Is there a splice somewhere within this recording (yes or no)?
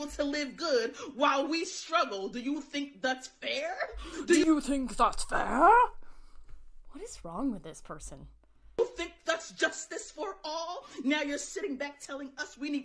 no